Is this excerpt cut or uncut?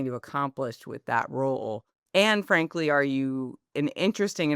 cut